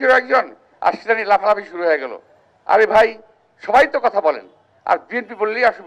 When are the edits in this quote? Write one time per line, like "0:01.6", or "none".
none